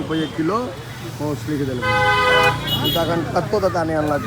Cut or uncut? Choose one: uncut